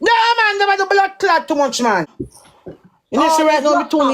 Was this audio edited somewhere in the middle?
yes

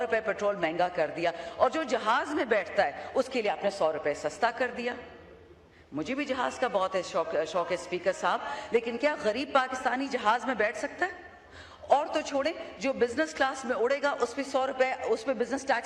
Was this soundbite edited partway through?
no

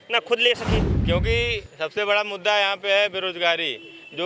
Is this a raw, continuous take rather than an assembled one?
no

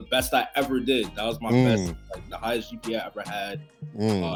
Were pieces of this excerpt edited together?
no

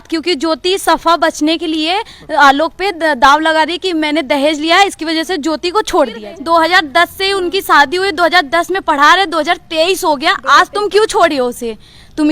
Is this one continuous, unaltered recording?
no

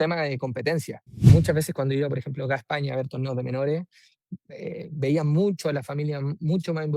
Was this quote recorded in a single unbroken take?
no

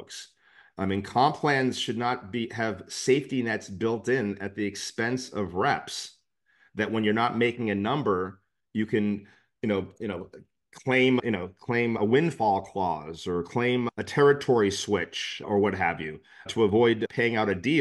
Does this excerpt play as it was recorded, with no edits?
yes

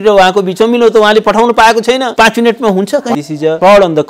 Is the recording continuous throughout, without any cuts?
no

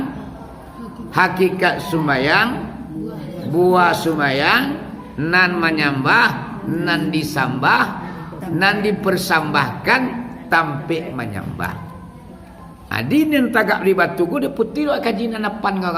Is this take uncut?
yes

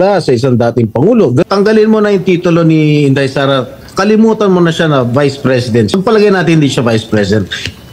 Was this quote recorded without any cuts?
no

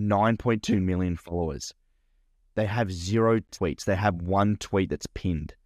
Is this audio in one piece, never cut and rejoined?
no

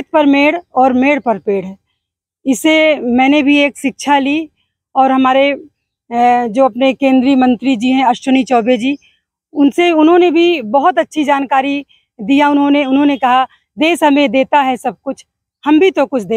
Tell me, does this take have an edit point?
no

